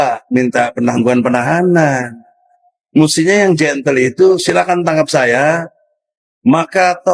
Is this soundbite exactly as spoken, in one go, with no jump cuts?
yes; 0 cuts

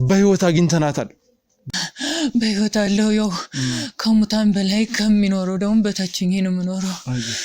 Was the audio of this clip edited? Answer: yes; 1 cut; at 1.6 s

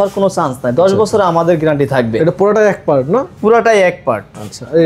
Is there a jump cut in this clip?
no; 0 cuts

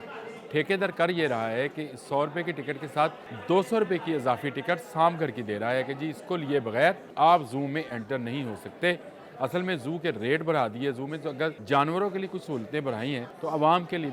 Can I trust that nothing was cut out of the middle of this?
no; 4 cuts; at 3.3 s, 7.1 s, 11.6 s, 13.3 s

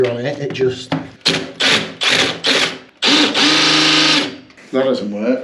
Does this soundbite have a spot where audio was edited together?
yes; 2 cuts; at 1.1 s, 2.8 s

